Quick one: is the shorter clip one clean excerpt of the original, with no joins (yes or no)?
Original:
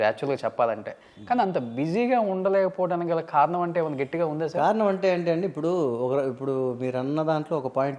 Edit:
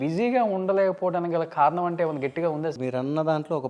no